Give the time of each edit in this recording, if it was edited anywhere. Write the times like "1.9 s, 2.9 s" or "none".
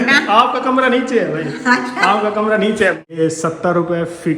3.1 s